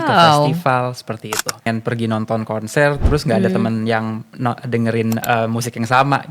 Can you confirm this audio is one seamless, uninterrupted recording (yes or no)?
no